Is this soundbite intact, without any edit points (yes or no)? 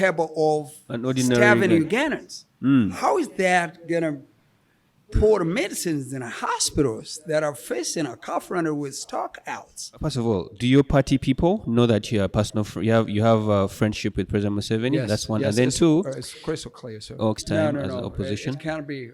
no